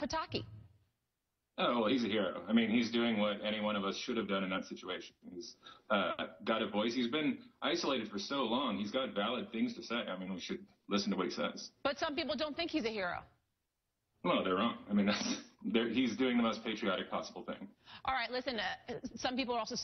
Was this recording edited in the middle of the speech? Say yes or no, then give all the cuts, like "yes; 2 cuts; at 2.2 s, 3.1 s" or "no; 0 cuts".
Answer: yes; 1 cut; at 12.7 s